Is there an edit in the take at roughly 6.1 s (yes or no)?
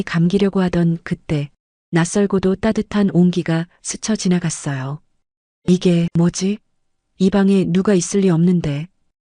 yes